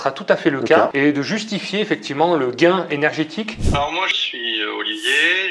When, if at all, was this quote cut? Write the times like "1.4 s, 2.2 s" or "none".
3.6 s